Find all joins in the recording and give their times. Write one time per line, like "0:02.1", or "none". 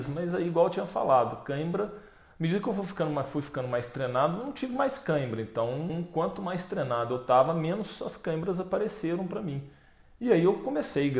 0:05.9